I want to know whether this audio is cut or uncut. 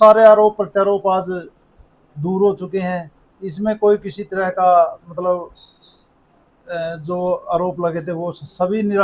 uncut